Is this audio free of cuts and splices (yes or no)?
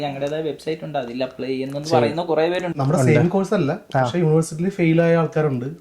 no